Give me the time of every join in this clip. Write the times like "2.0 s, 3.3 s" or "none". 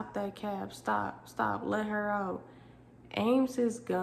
none